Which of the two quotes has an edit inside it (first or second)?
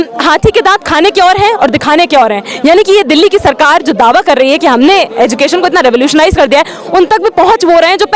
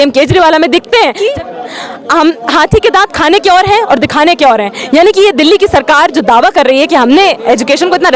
second